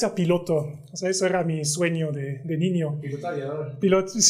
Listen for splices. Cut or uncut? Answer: uncut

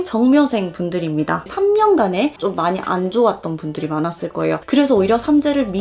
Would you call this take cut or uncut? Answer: cut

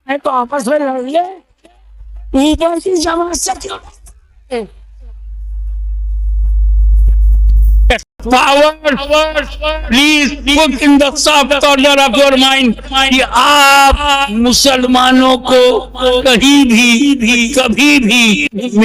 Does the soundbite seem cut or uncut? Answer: cut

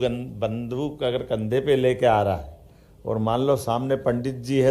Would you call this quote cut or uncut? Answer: uncut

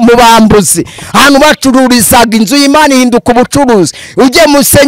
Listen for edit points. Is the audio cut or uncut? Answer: uncut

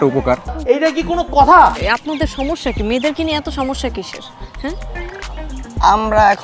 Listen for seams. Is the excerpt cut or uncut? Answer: cut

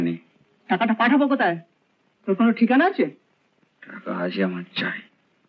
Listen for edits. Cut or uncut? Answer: uncut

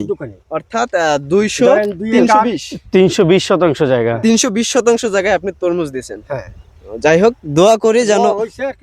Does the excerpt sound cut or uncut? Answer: uncut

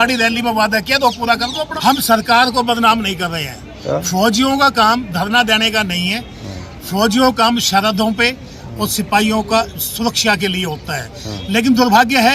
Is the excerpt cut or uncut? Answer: cut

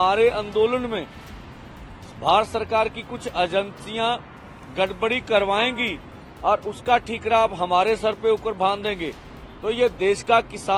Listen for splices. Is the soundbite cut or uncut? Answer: uncut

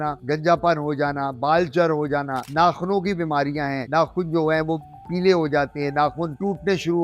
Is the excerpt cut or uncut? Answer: uncut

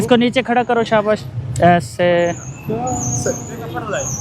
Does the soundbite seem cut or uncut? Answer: uncut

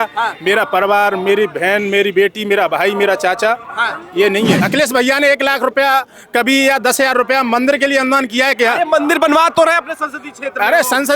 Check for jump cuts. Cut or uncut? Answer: cut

